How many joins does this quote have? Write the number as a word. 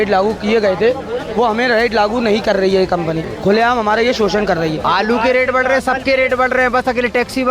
two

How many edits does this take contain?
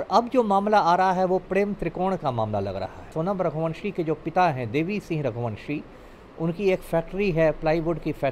one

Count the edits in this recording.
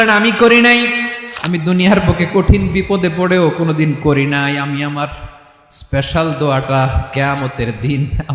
one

